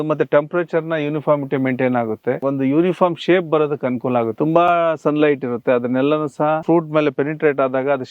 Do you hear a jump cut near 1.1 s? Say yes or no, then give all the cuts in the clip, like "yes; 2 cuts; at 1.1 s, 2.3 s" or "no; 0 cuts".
no; 3 cuts; at 2.4 s, 4.3 s, 6.6 s